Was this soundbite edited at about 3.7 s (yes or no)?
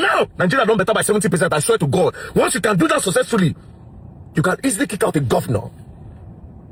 no